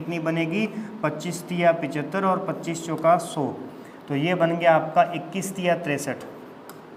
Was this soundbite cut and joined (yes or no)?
no